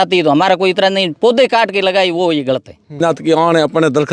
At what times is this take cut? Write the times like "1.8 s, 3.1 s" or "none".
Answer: 3.0 s